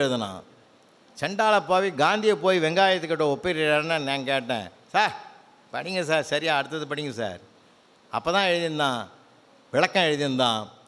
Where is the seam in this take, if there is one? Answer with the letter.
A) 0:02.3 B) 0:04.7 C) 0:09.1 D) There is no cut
D